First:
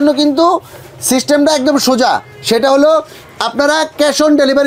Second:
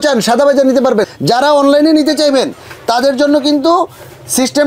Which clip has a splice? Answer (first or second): second